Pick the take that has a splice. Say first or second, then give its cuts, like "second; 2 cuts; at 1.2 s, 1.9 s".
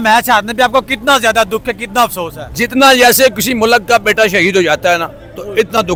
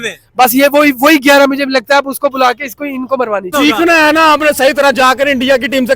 second; 1 cut; at 3.5 s